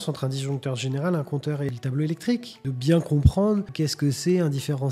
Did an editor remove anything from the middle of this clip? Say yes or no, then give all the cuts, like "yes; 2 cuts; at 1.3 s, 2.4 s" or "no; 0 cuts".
yes; 3 cuts; at 1.7 s, 2.6 s, 3.7 s